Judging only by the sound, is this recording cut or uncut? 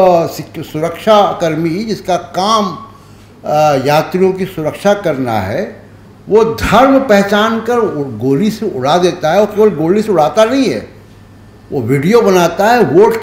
uncut